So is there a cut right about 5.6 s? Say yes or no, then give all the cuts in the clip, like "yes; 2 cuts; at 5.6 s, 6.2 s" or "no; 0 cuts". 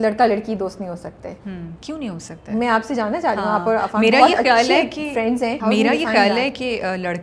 yes; 2 cuts; at 1.4 s, 5.6 s